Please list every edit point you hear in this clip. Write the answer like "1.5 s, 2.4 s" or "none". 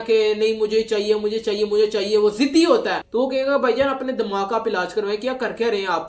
3.0 s